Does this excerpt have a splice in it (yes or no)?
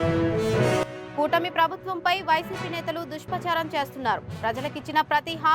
yes